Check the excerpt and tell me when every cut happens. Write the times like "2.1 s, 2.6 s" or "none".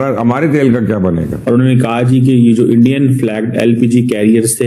1.3 s